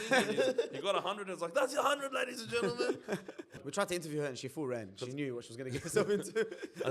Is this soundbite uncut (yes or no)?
no